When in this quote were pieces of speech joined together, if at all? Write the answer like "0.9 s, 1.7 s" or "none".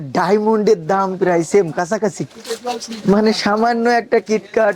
none

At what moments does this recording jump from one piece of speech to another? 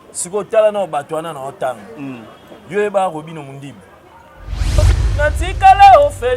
4.8 s

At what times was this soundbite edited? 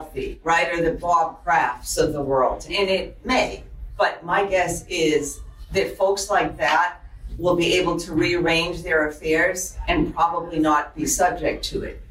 1.0 s

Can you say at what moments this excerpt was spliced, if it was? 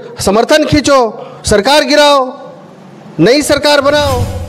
none

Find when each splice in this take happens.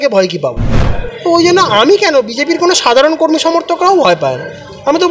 none

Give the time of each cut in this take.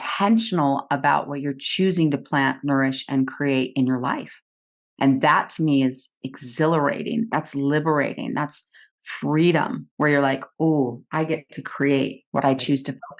12.2 s

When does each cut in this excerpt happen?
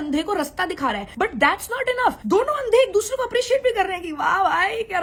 none

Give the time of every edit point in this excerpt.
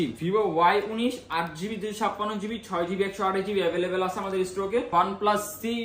4.9 s

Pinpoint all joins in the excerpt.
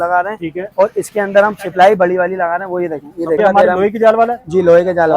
3.4 s

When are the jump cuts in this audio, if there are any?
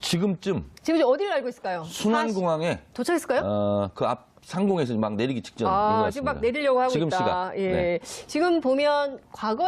6.2 s

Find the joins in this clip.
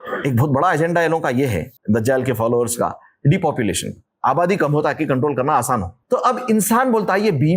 1.7 s, 5.9 s

